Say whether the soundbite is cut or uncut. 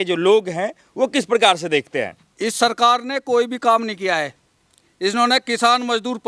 cut